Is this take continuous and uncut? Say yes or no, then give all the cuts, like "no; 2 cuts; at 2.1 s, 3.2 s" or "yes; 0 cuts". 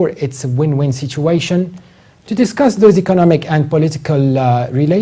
no; 1 cut; at 2.5 s